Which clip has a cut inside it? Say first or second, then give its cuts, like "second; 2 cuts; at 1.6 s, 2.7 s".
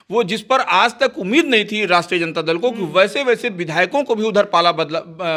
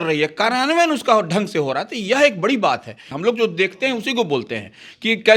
second; 1 cut; at 3.1 s